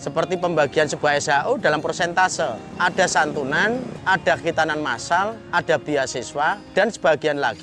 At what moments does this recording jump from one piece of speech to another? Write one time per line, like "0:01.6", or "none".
0:02.6
0:03.9
0:05.4
0:06.6